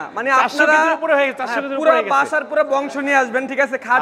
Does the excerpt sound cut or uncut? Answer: uncut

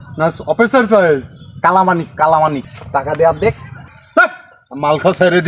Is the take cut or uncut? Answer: cut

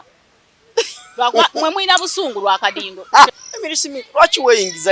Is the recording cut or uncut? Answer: cut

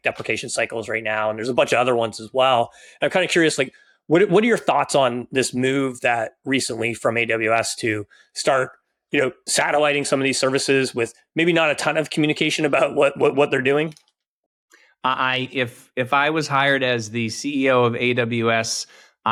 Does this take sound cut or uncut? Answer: uncut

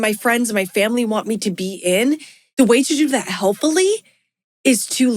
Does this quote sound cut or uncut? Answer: cut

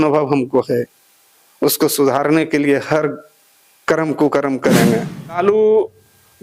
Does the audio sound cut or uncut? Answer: cut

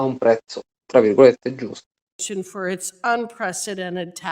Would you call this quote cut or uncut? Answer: cut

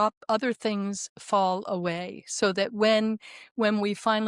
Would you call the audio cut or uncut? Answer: uncut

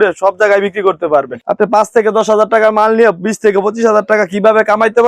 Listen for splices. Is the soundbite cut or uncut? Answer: cut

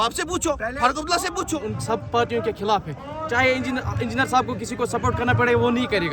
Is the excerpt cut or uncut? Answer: cut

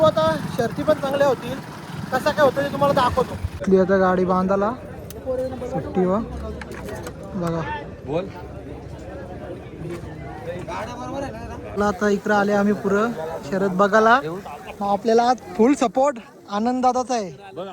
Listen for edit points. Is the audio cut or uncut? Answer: cut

